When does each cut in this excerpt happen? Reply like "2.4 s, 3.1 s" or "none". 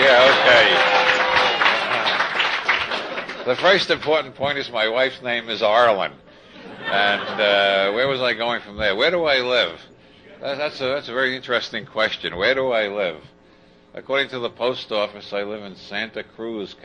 none